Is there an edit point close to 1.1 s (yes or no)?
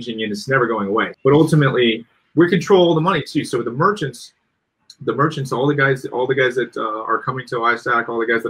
yes